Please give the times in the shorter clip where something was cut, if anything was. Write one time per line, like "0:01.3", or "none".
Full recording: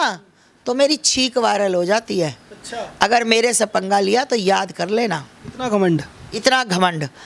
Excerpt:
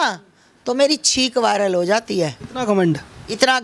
0:02.5